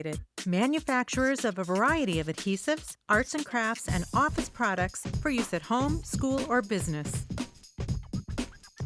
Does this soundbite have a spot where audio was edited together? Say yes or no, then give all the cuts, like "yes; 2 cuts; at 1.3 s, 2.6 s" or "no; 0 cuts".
yes; 1 cut; at 7.3 s